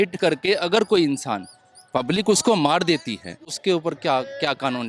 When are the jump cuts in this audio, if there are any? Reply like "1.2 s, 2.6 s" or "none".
3.5 s